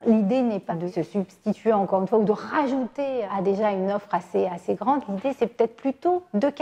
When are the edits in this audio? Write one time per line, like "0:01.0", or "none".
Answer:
0:00.9
0:03.3